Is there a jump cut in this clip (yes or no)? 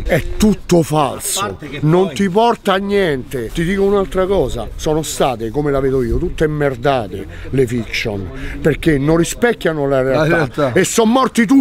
no